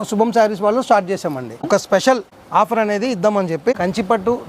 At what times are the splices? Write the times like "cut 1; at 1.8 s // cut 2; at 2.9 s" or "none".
cut 1; at 1.5 s // cut 2; at 2.3 s // cut 3; at 3.8 s